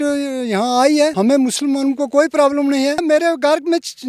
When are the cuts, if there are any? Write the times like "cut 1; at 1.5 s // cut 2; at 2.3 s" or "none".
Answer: cut 1; at 1.1 s // cut 2; at 3.0 s